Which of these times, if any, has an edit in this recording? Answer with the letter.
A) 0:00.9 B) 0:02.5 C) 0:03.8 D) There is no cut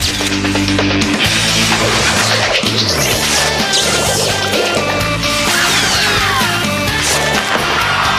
B